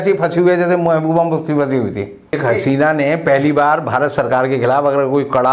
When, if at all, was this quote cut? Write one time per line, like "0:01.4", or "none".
0:02.4